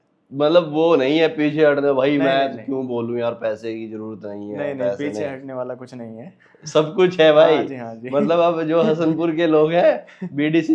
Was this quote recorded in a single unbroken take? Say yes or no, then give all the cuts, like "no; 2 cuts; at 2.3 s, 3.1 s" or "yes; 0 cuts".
yes; 0 cuts